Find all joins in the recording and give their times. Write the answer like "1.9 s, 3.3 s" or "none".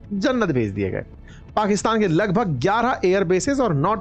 none